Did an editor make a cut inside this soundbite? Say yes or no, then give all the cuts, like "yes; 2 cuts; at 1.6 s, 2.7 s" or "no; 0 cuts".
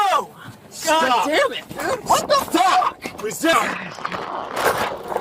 yes; 1 cut; at 3.5 s